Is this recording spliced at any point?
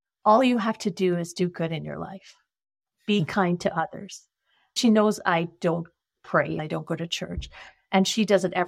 yes; 2 cuts; at 4.8 s, 6.6 s

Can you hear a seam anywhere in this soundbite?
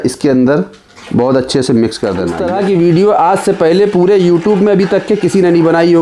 yes; 1 cut; at 2.4 s

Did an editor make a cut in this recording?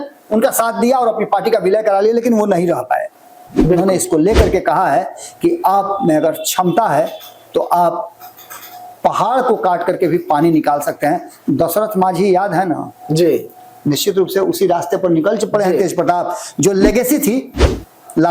yes; 1 cut; at 3.5 s

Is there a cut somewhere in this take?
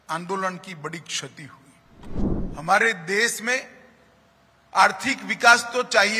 yes; 1 cut; at 2.1 s

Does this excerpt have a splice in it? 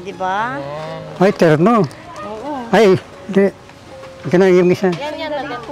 no; 0 cuts

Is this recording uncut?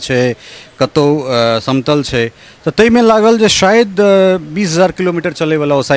yes; 0 cuts

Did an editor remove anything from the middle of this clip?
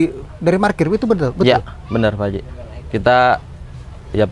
no; 0 cuts

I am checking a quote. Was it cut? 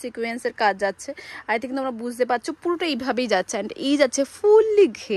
no; 0 cuts

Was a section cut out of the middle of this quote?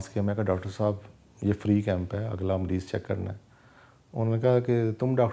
no; 0 cuts

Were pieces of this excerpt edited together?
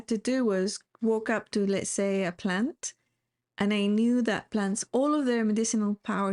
no; 0 cuts

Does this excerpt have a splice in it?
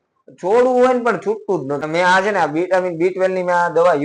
yes; 1 cut; at 1.8 s

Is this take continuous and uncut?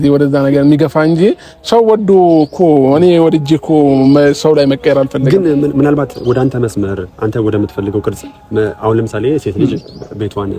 yes; 0 cuts

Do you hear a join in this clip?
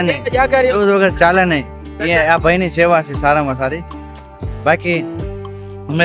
no; 0 cuts

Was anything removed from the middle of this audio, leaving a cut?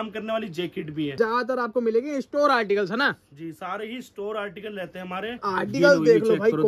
yes; 2 cuts; at 1.1 s, 5.5 s

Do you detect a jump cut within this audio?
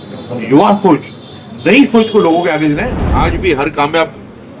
yes; 1 cut; at 3.0 s

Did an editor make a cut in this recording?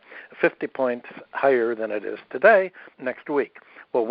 yes; 1 cut; at 2.9 s

